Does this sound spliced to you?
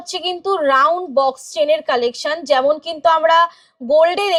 no; 0 cuts

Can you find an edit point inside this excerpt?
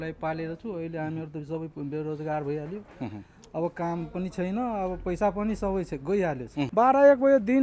yes; 1 cut; at 6.5 s

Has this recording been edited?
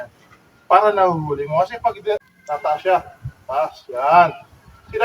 yes; 1 cut; at 2.2 s

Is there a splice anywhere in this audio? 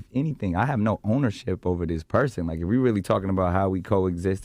no; 0 cuts

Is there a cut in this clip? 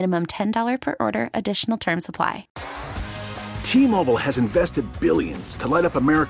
yes; 1 cut; at 2.5 s

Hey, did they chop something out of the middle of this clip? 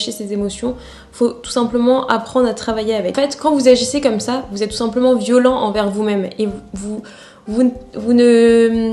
no; 0 cuts

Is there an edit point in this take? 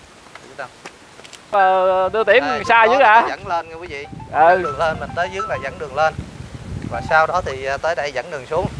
yes; 1 cut; at 1.5 s

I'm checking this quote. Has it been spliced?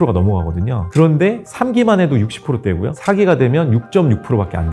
no; 0 cuts

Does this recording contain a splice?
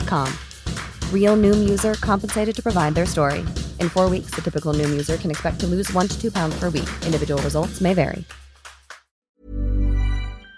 yes; 1 cut; at 9.3 s

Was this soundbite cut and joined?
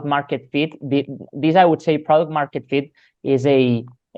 no; 0 cuts

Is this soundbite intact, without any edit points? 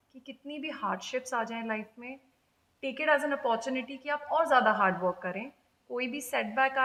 yes; 0 cuts

